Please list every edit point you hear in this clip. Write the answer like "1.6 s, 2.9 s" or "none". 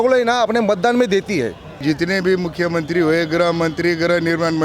1.8 s